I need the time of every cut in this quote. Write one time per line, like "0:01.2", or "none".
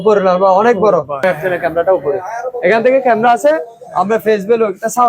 0:01.2